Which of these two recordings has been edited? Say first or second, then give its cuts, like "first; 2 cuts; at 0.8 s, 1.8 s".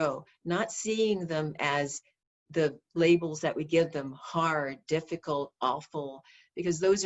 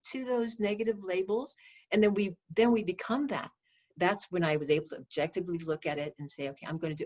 second; 1 cut; at 3.9 s